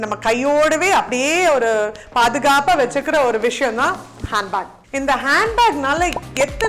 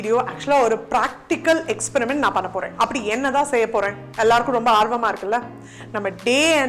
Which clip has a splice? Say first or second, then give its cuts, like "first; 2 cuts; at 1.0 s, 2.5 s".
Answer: first; 1 cut; at 4.8 s